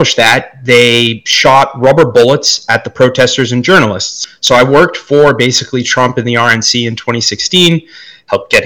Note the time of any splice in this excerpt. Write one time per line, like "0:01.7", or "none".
0:04.2